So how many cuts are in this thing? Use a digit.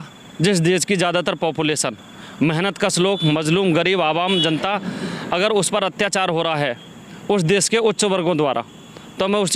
0